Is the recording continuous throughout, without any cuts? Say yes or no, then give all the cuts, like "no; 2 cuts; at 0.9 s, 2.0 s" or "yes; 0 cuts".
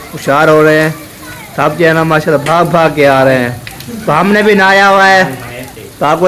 yes; 0 cuts